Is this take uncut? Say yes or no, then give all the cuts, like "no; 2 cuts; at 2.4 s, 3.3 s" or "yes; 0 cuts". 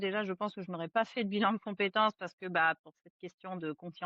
yes; 0 cuts